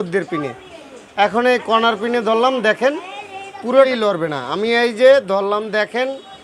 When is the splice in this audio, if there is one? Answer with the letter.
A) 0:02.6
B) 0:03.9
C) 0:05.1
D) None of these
B